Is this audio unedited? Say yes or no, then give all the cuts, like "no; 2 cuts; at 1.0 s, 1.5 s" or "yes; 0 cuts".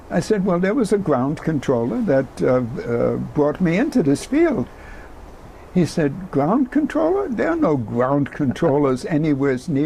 yes; 0 cuts